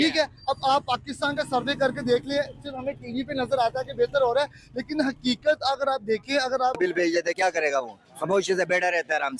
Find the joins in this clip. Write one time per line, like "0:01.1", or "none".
0:06.8